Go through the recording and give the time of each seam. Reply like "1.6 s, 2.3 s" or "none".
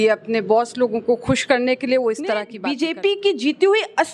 2.5 s

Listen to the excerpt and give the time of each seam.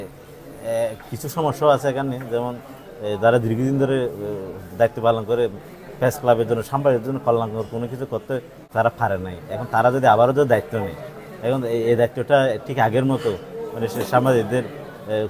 8.6 s

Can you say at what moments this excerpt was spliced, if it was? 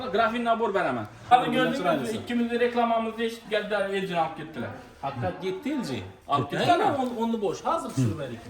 1.3 s

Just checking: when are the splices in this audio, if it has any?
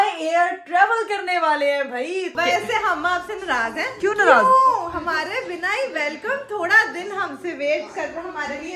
2.3 s, 3.9 s

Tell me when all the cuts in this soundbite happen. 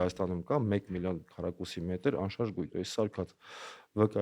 2.6 s

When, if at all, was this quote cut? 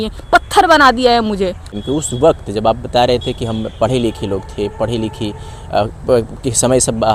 none

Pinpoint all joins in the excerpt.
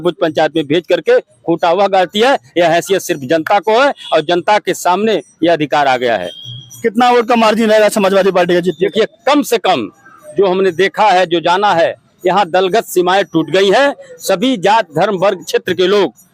none

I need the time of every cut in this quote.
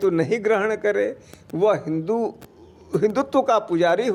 none

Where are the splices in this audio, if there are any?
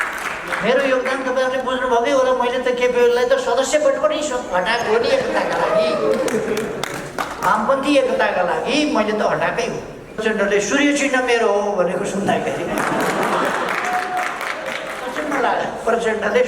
10.2 s

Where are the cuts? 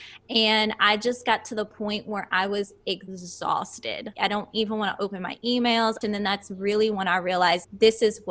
3.2 s, 4.1 s, 6.0 s

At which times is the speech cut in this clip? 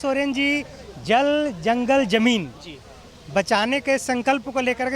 none

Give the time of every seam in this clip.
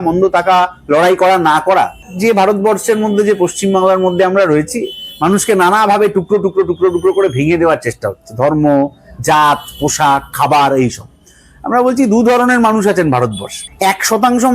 none

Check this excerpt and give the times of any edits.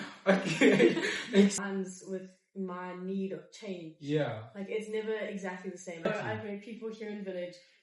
1.6 s, 6.0 s

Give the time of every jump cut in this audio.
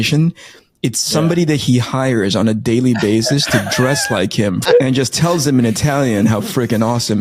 4.6 s

